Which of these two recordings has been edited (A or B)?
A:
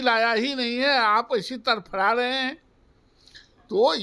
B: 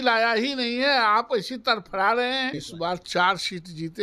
B